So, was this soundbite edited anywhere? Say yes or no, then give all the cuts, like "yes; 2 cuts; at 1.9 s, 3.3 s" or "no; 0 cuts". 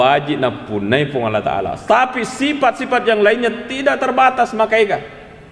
no; 0 cuts